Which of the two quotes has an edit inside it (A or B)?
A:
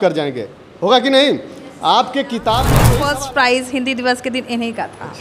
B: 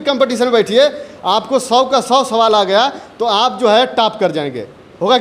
A